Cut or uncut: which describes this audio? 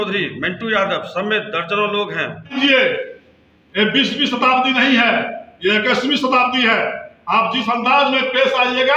cut